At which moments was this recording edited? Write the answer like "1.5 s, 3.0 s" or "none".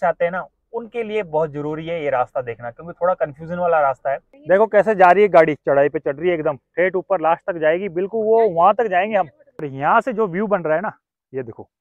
4.3 s, 9.7 s

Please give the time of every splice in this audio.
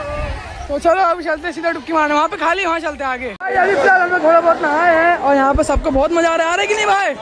3.4 s

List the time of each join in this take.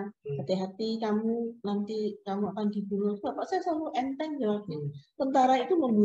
none

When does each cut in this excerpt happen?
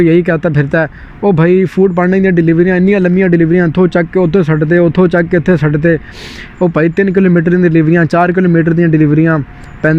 none

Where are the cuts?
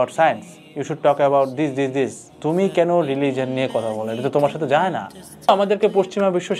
5.5 s

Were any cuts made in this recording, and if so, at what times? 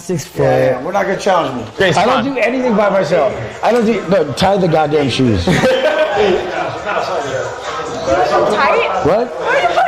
1.6 s

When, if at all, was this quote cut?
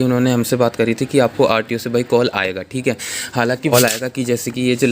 3.7 s

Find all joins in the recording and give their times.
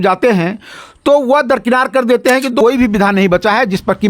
2.6 s

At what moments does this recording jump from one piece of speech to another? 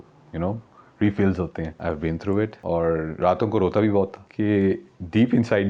1.7 s, 2.6 s, 4.2 s

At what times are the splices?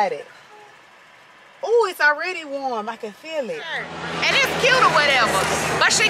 4.0 s

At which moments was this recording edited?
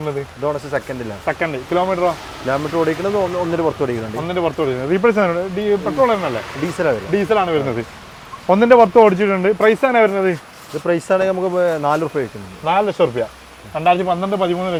none

